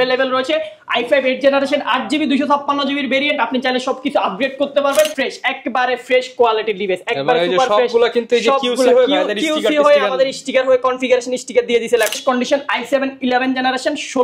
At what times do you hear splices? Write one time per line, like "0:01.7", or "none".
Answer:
0:05.2
0:12.1